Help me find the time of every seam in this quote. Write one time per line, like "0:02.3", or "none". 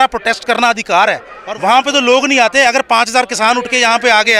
0:01.3